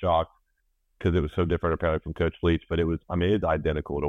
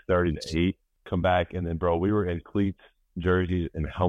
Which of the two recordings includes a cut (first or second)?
second